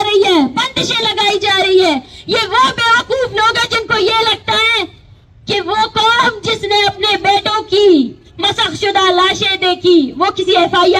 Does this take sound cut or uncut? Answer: uncut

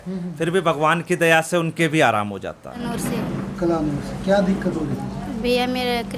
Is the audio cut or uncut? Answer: cut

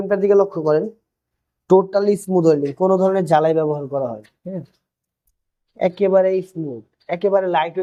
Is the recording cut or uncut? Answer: uncut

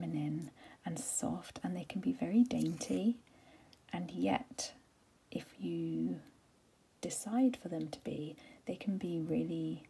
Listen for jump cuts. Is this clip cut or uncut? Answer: uncut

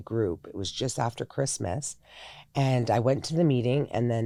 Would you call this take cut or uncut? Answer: uncut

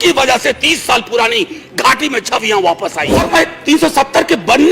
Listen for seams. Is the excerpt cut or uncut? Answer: cut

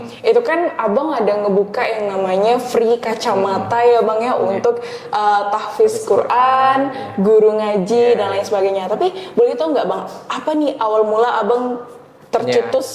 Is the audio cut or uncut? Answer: uncut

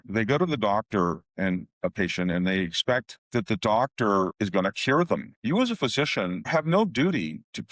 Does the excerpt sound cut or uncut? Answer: uncut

